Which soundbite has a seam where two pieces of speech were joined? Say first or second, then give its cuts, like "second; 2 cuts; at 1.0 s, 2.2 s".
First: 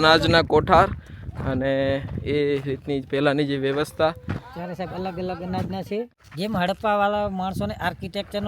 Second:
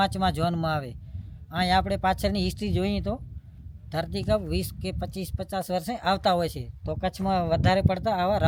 first; 1 cut; at 6.2 s